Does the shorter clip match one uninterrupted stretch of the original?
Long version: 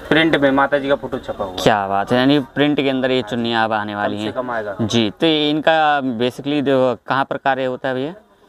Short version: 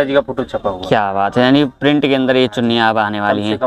yes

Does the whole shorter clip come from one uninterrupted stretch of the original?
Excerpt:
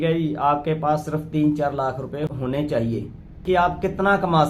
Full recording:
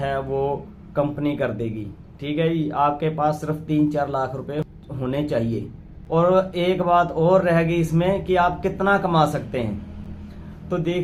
no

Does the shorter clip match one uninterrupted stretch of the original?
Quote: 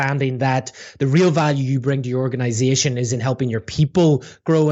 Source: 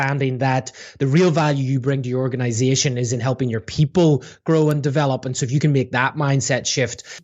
yes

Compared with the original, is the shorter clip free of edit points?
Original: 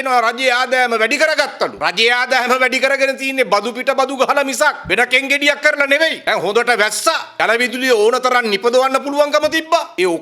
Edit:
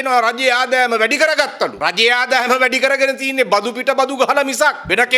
yes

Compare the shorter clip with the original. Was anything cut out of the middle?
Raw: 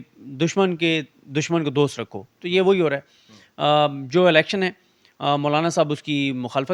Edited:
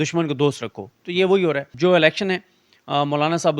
yes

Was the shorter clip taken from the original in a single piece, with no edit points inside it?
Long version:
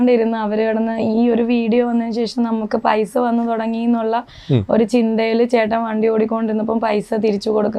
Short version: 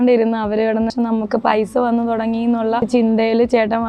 no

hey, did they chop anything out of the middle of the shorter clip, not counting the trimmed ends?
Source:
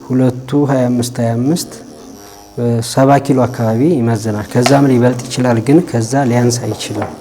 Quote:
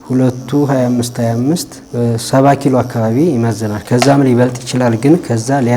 yes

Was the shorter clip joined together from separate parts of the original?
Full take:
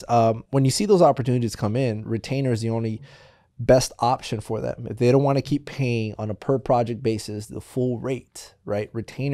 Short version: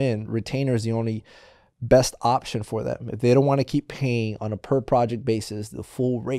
no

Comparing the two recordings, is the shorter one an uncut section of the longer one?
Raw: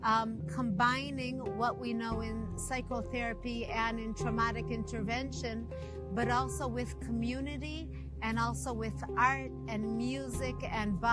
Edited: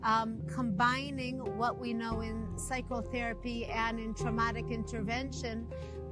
yes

